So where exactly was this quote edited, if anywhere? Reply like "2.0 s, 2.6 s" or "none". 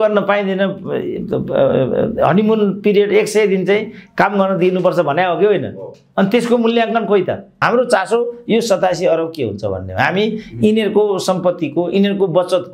7.5 s

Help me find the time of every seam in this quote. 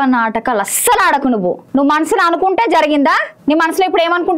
1.6 s, 3.3 s

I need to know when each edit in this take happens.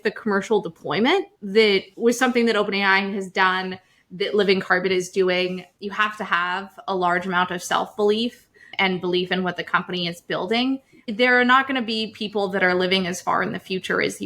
1.8 s, 5.7 s, 11.0 s

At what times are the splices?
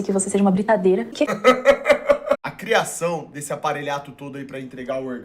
1.1 s, 2.4 s

